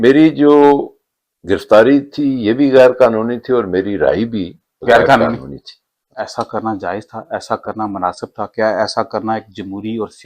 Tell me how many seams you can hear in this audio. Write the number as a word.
one